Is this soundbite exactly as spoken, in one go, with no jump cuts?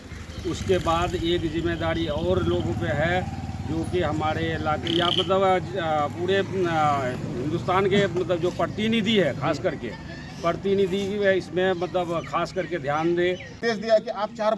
no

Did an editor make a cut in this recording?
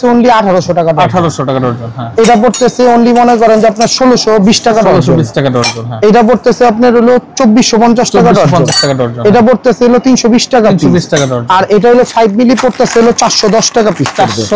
no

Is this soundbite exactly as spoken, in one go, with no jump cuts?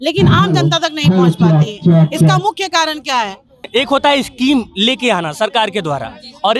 no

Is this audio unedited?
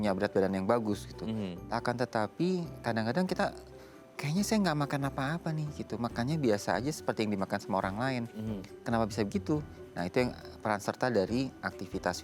yes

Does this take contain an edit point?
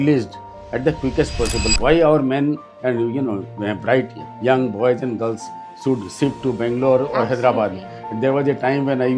yes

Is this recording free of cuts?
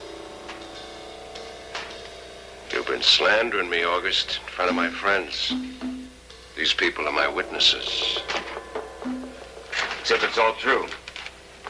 no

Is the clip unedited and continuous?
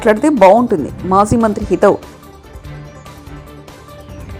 yes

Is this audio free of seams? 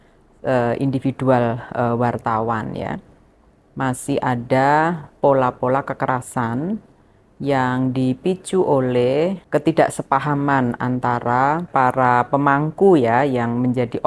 no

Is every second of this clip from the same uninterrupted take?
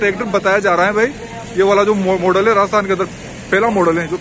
yes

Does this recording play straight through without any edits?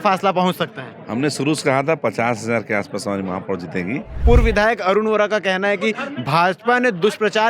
no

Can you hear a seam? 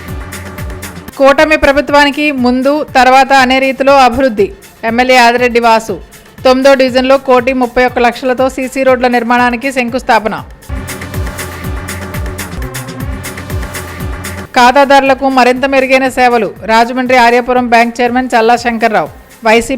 yes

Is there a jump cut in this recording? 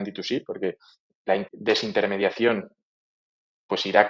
no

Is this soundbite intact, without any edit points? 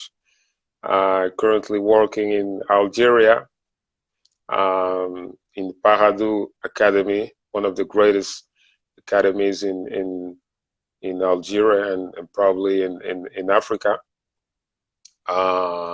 no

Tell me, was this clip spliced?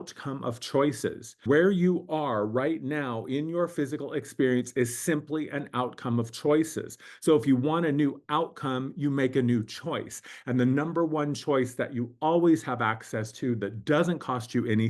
yes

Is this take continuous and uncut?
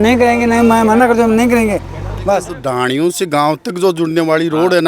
no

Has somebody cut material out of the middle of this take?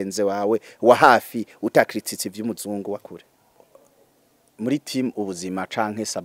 yes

